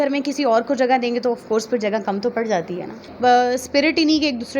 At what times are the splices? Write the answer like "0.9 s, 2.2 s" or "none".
3.1 s